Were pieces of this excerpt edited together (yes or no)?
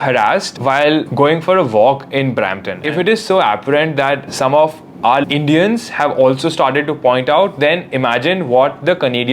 yes